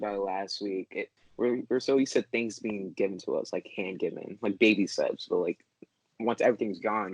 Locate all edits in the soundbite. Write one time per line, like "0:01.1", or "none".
0:01.2